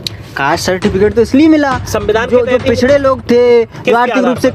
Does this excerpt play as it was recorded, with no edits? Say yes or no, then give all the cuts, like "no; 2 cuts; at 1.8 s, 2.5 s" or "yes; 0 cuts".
yes; 0 cuts